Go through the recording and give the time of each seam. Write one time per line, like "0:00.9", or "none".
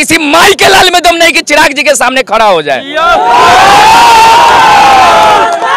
none